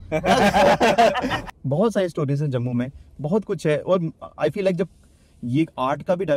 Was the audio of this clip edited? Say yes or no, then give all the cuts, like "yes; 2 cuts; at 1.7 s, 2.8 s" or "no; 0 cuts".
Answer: yes; 1 cut; at 1.4 s